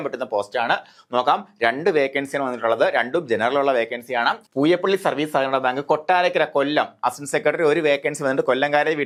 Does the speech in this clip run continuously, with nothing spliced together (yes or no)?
yes